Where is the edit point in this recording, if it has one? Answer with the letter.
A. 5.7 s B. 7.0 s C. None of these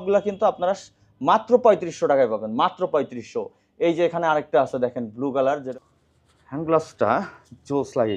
A